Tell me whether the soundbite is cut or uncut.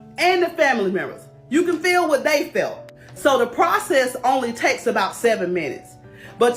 cut